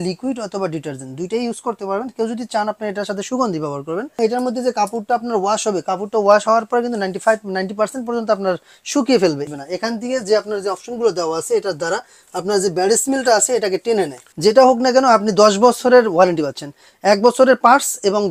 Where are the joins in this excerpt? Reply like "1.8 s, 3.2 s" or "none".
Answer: 4.2 s, 9.4 s, 14.2 s